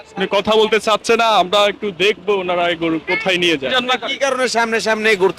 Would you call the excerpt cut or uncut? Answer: cut